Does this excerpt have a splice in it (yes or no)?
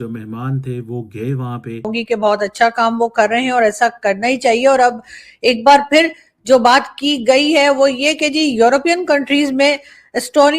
yes